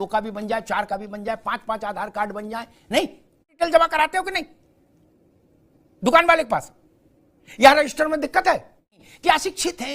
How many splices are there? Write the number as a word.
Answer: two